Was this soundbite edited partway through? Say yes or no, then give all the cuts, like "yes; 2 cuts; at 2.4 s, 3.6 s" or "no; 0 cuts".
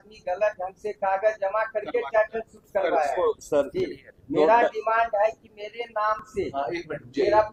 no; 0 cuts